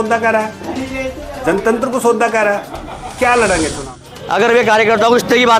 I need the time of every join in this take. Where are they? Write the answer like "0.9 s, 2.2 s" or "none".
4.0 s